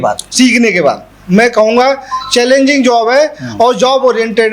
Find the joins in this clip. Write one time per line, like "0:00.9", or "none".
0:01.1